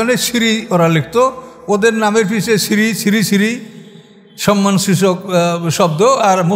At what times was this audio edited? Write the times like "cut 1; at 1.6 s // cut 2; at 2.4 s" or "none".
none